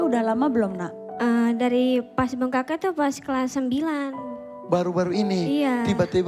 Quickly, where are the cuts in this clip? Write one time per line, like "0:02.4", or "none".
none